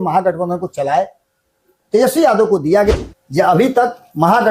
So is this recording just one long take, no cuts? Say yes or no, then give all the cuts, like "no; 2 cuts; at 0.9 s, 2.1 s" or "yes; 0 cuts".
no; 1 cut; at 2.9 s